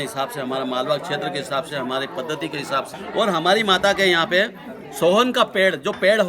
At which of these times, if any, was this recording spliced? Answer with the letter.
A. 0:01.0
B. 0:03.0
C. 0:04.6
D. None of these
B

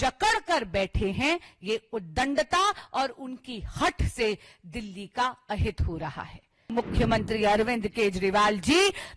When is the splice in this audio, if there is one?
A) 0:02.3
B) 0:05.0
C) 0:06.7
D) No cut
C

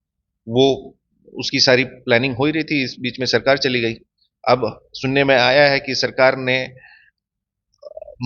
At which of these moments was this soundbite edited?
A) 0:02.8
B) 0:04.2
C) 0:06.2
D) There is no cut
D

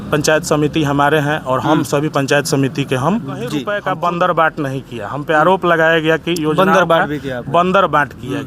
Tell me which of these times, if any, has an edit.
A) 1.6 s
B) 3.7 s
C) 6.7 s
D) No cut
B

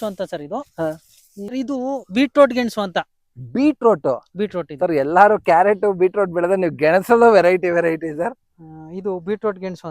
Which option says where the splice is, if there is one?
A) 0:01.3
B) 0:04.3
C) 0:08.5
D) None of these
A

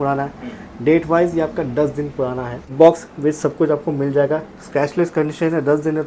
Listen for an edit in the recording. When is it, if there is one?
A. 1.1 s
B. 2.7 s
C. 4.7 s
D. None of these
B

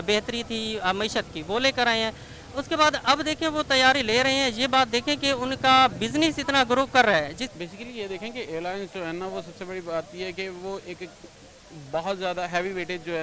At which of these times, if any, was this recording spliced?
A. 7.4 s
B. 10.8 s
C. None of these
A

